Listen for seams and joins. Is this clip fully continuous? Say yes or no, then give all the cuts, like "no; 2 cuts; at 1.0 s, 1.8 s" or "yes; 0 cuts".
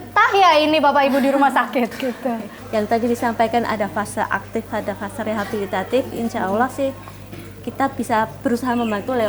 no; 1 cut; at 2.6 s